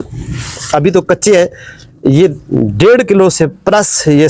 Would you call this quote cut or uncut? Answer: uncut